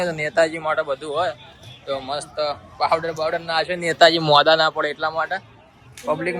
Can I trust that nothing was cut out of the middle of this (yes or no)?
yes